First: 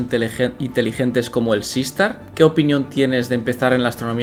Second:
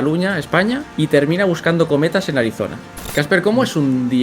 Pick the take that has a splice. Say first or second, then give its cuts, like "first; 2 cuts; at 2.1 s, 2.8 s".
second; 2 cuts; at 0.9 s, 2.8 s